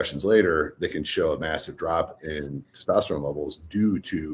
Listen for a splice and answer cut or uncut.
uncut